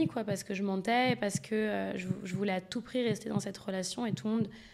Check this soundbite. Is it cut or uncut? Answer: uncut